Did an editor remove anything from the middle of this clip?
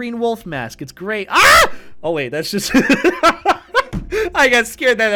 no; 0 cuts

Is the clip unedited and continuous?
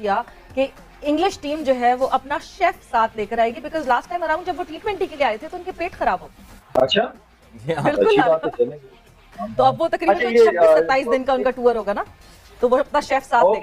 yes; 0 cuts

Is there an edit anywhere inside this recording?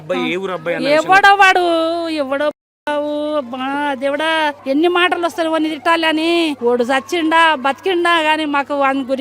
yes; 2 cuts; at 4.6 s, 6.6 s

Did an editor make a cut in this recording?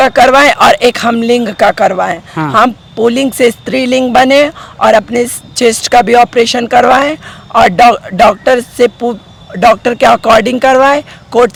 no; 0 cuts

